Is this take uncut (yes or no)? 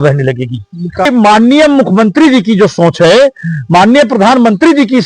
no